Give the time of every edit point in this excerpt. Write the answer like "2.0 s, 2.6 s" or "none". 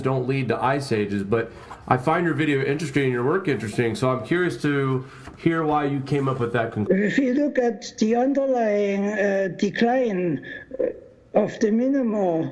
none